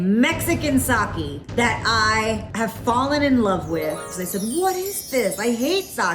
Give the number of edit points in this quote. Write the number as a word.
three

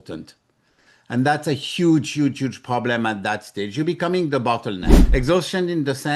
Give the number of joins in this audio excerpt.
one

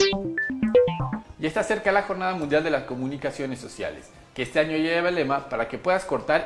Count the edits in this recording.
zero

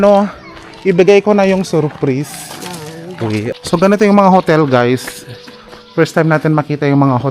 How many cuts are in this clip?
one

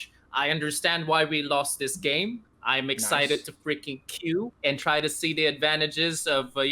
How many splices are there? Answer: two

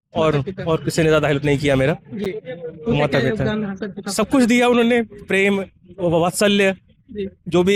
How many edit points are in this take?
zero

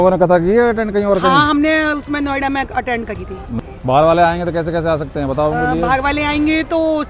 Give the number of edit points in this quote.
one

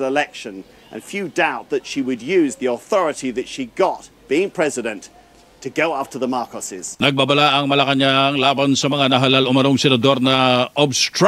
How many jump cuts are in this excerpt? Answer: one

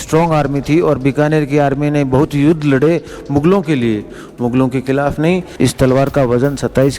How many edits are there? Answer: one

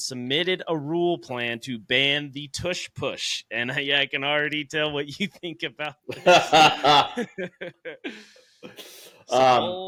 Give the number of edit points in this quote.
zero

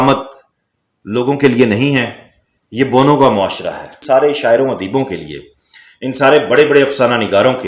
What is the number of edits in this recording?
one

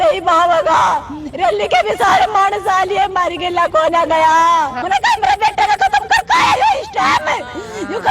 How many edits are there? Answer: one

